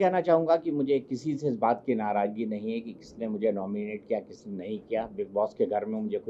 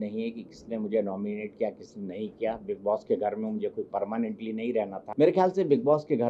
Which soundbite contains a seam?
second; 1 cut; at 5.0 s

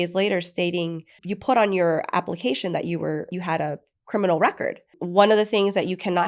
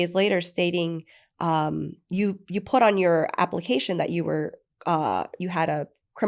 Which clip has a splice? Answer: first; 3 cuts; at 1.2 s, 3.3 s, 5.0 s

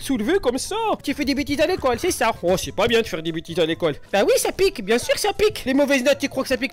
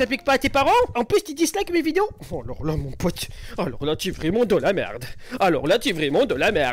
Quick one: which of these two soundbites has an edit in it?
first; 3 cuts; at 1.0 s, 4.0 s, 5.6 s

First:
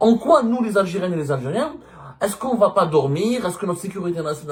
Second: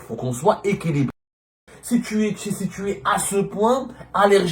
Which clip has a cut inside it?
second; 1 cut; at 1.5 s

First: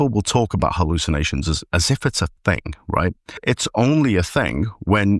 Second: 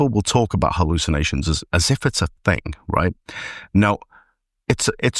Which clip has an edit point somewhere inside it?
first; 1 cut; at 3.4 s

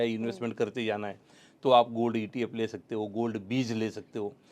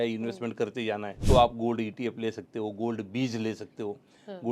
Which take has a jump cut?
second; 1 cut; at 1.1 s

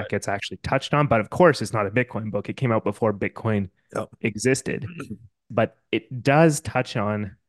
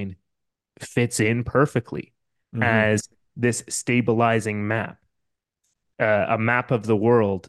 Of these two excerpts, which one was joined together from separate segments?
first; 1 cut; at 5.4 s

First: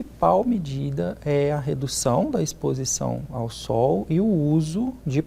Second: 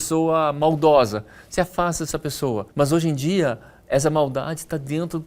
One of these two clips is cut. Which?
second; 1 cut; at 2.7 s

